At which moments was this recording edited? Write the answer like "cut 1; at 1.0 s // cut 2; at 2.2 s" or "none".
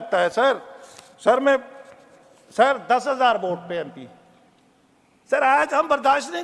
none